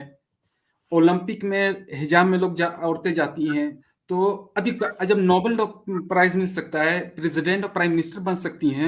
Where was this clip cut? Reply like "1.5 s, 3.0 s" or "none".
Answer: 3.8 s